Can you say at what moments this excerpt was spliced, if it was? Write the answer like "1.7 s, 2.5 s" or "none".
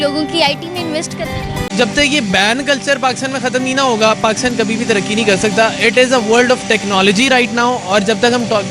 1.6 s